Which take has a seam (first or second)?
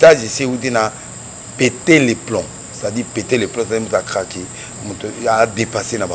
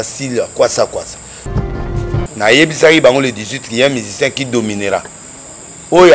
second